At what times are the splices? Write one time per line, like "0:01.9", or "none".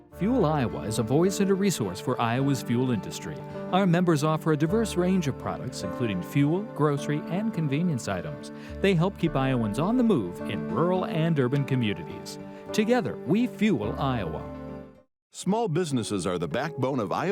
none